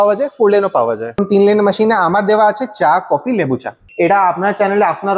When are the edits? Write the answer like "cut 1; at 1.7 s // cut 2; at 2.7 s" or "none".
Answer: cut 1; at 1.2 s // cut 2; at 3.8 s